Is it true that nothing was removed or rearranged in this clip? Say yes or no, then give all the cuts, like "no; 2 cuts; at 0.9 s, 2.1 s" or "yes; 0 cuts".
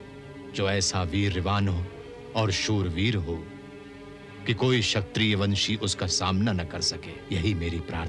no; 1 cut; at 7.1 s